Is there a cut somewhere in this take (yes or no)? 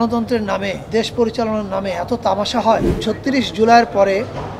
yes